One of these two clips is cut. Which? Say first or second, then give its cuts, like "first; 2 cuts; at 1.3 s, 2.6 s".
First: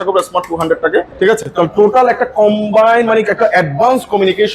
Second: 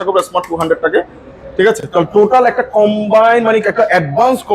first; 1 cut; at 1.1 s